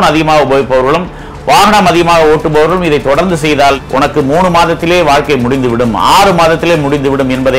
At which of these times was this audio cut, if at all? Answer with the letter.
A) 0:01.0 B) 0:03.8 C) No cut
B